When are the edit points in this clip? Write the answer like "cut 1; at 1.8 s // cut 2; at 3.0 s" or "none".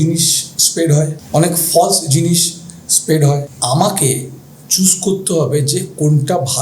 cut 1; at 1.2 s // cut 2; at 3.5 s